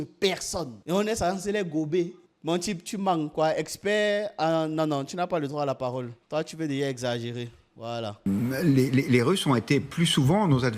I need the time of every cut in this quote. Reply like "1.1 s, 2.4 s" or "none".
2.2 s, 8.2 s